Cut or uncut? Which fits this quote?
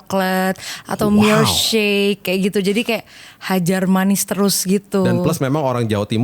uncut